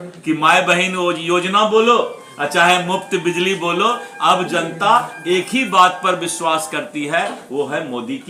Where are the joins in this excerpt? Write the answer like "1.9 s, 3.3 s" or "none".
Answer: none